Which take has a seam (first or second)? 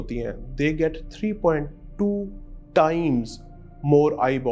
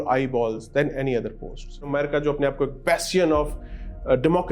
second